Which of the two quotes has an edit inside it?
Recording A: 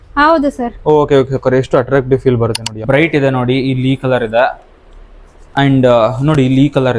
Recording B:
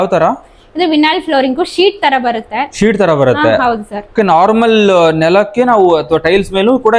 A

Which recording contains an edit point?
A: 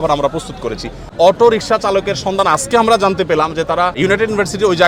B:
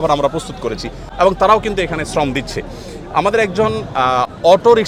A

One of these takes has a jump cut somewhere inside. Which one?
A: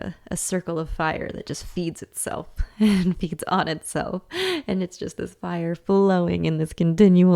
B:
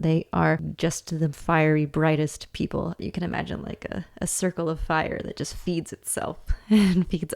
B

